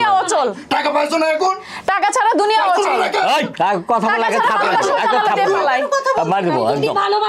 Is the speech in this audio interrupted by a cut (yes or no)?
no